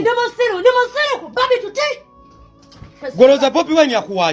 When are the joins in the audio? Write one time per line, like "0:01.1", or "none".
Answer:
none